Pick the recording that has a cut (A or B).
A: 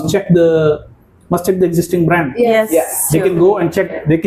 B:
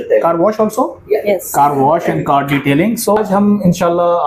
B